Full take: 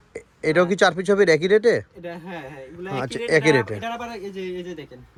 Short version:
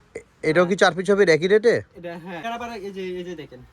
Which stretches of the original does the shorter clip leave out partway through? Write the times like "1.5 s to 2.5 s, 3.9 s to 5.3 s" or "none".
2.4 s to 3.8 s